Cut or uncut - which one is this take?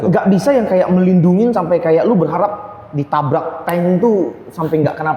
uncut